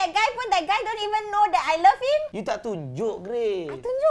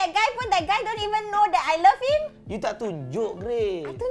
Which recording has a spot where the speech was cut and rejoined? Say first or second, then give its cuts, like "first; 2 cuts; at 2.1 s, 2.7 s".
first; 1 cut; at 2.3 s